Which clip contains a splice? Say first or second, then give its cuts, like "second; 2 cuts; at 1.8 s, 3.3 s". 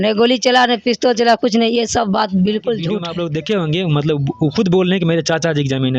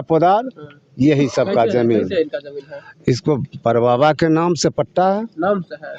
first; 1 cut; at 3.1 s